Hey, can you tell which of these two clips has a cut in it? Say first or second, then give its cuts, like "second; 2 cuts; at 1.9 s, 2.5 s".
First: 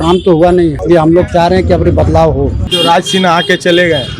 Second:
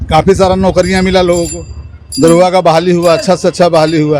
first; 2 cuts; at 0.8 s, 2.6 s